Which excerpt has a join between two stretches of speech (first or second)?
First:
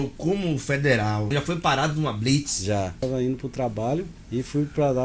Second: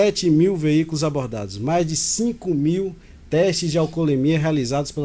first